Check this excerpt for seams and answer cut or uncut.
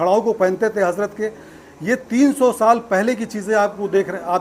uncut